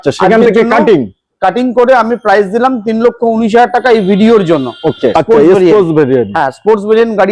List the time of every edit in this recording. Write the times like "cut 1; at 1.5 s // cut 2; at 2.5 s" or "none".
cut 1; at 5.1 s